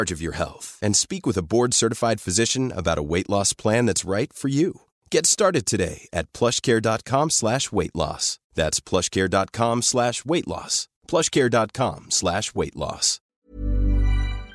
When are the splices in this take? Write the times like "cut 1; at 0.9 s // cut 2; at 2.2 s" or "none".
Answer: cut 1; at 13.4 s

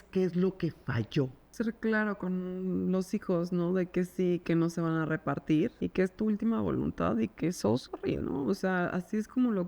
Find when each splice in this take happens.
cut 1; at 1.5 s // cut 2; at 4.4 s // cut 3; at 5.7 s

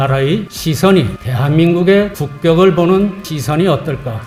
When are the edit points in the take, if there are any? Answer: none

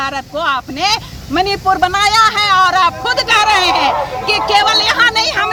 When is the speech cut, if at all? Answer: none

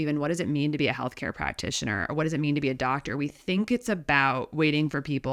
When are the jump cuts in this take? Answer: none

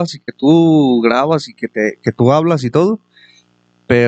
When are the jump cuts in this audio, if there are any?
none

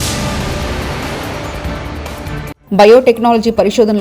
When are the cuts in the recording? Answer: cut 1; at 2.6 s

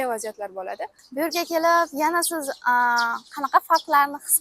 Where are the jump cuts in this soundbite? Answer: cut 1; at 1.0 s

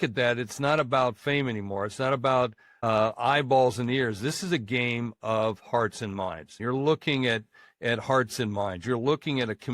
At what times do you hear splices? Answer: cut 1; at 2.7 s // cut 2; at 6.5 s

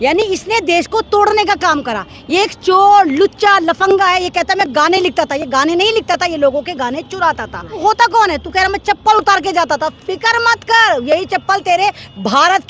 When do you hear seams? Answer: cut 1; at 7.8 s

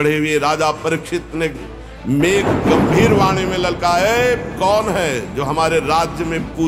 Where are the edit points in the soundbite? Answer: none

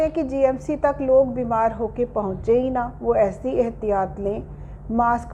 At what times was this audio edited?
none

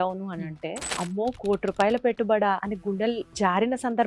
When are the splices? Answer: cut 1; at 0.8 s // cut 2; at 3.0 s

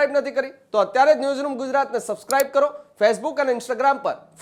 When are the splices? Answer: none

